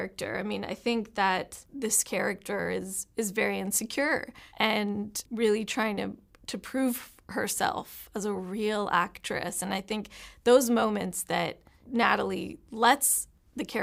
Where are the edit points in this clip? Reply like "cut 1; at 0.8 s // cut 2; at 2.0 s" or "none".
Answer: cut 1; at 1.6 s